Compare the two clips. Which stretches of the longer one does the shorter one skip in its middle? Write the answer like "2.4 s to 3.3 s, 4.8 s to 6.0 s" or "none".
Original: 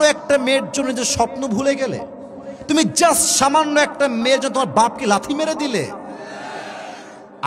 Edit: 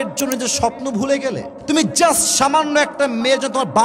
2.1 s to 2.5 s